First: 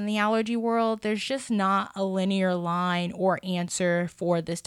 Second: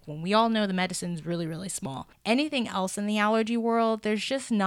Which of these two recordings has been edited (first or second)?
second